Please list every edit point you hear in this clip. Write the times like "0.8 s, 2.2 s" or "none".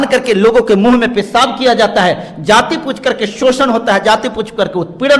none